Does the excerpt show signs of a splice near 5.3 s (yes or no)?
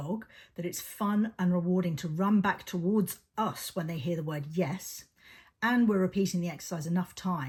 no